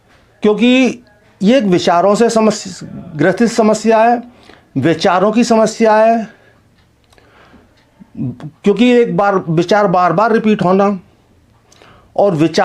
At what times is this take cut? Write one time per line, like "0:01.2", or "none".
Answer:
none